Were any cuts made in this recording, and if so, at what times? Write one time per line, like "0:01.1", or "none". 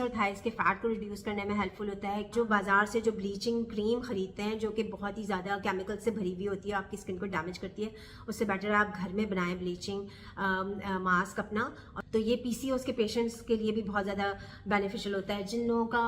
0:02.3
0:11.9